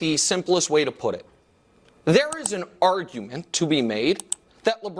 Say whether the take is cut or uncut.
uncut